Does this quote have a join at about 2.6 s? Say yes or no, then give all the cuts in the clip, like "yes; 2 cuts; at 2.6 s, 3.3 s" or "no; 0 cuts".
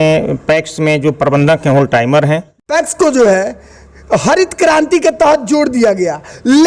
yes; 1 cut; at 2.6 s